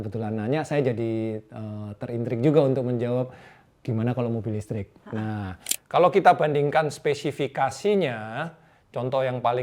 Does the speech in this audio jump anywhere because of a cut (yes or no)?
yes